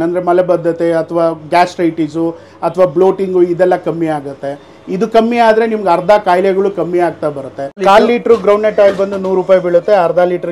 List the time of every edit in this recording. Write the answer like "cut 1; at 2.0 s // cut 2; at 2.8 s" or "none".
cut 1; at 7.8 s